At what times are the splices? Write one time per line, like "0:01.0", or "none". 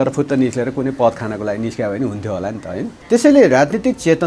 0:03.0

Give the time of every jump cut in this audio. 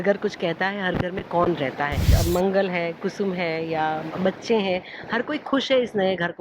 0:02.1

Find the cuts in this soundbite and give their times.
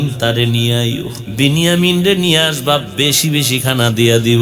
0:01.2

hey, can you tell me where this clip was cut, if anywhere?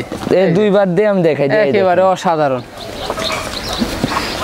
none

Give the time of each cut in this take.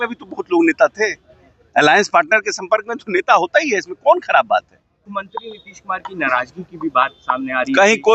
0:05.1

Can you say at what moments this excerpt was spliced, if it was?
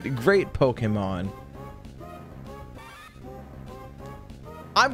none

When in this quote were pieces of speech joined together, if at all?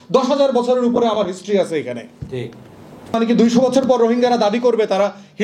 0:03.1

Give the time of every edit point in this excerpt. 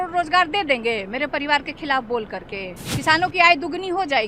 0:02.9

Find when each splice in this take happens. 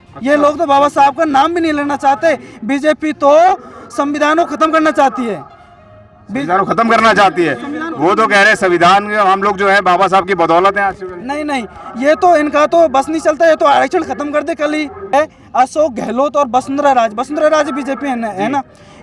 0:15.1

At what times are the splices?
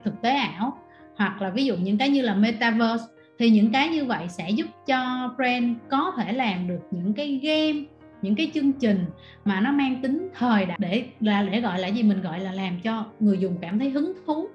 0:10.7

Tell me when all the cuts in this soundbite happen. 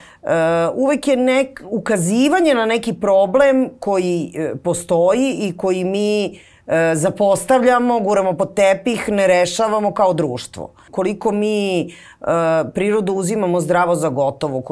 0:10.9

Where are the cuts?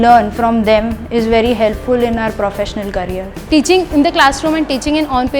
0:03.3

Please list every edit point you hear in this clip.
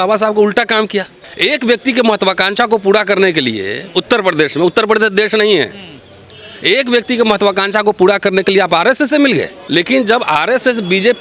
0:01.2
0:09.6

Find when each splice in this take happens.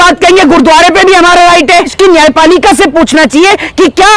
0:01.9

